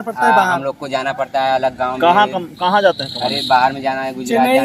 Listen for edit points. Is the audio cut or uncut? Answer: uncut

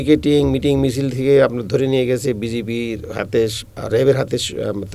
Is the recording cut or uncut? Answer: cut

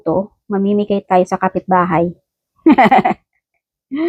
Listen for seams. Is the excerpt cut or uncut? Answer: uncut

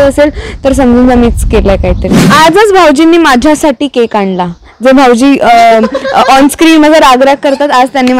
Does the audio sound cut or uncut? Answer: cut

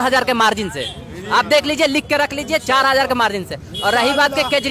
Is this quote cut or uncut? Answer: uncut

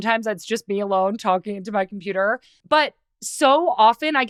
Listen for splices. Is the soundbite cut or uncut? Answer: uncut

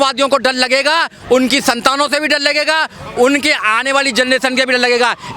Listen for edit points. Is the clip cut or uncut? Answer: uncut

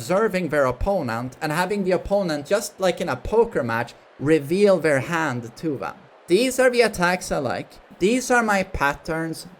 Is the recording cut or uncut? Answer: uncut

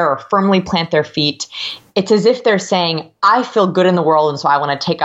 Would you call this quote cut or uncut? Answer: uncut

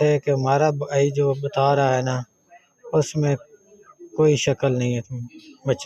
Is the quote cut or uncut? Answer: uncut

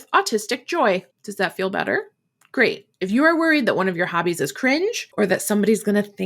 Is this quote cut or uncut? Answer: cut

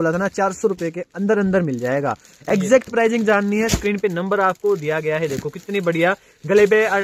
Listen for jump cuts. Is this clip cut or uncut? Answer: uncut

